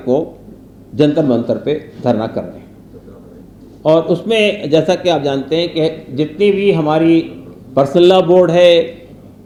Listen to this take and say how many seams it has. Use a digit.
0